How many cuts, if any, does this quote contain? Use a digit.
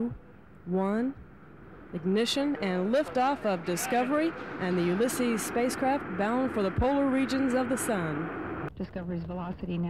1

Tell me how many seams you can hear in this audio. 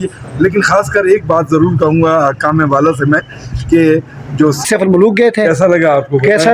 1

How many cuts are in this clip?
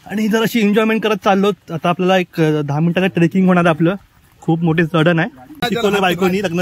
1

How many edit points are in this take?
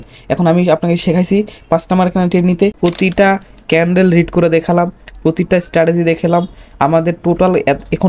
1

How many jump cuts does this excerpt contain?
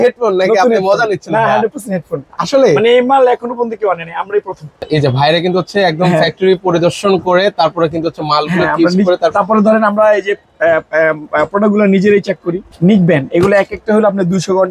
2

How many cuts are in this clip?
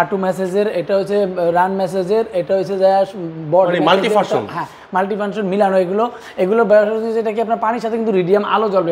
0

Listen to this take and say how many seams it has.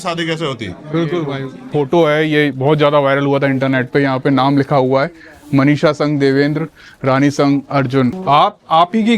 2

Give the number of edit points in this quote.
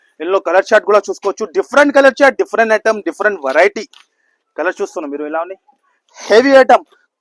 0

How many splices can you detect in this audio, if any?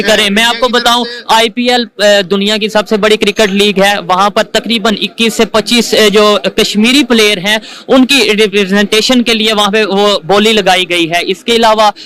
0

